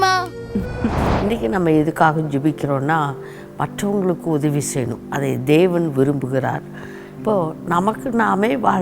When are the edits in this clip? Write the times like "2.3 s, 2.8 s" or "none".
1.0 s